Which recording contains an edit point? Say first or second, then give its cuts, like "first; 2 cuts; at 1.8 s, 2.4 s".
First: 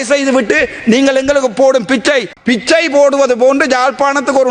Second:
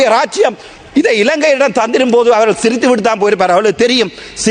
first; 1 cut; at 2.3 s